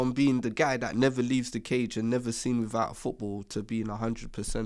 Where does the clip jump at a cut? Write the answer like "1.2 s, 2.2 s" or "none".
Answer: none